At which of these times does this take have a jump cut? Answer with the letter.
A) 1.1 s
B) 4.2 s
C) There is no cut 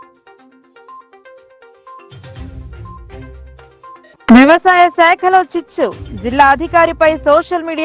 A